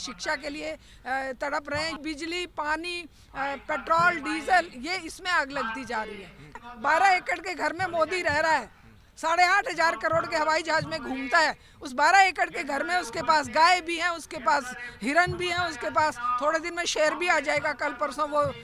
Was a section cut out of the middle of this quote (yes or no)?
yes